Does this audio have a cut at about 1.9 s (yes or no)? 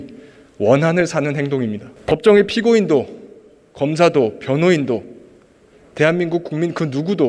yes